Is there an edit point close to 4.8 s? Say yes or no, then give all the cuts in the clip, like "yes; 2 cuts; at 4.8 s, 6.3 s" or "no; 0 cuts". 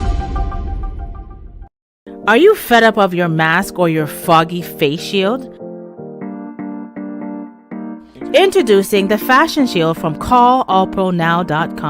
no; 1 cut; at 2.1 s